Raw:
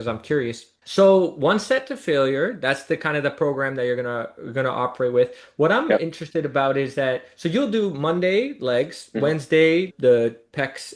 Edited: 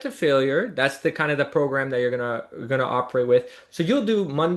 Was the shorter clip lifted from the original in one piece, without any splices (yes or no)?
no